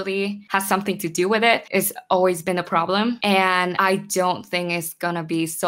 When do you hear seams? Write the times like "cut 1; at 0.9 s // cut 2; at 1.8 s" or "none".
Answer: cut 1; at 1.7 s